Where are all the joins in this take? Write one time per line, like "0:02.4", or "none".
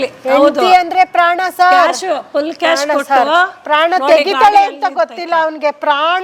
none